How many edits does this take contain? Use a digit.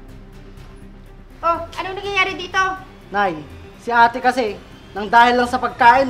1